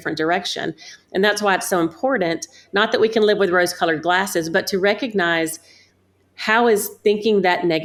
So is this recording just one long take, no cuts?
yes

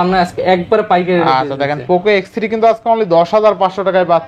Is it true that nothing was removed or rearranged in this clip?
yes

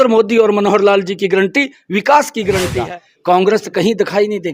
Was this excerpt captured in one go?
no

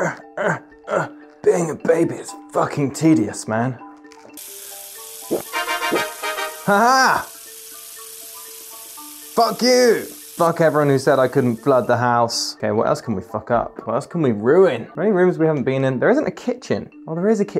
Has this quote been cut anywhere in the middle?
no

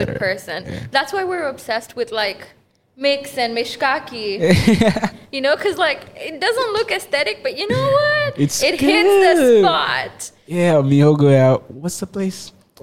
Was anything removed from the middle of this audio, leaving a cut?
no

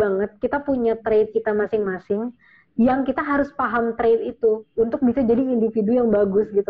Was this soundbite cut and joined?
no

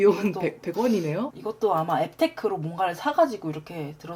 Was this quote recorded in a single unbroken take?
yes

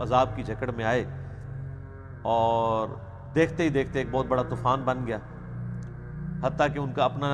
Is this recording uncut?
yes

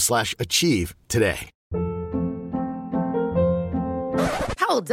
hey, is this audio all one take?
no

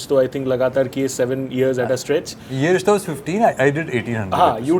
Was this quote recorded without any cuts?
yes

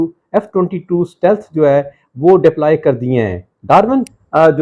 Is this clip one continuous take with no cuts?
yes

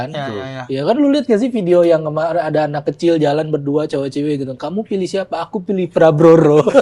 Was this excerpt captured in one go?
yes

